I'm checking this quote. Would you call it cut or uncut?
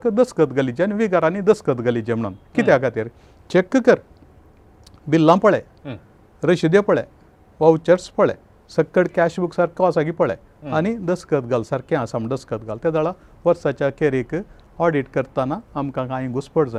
uncut